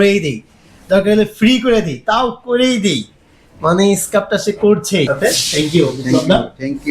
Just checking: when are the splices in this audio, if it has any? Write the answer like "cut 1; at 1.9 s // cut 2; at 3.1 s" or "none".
cut 1; at 5.1 s